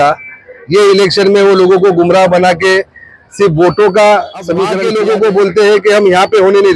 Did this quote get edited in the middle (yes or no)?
yes